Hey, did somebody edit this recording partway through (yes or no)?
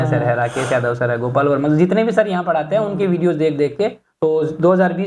yes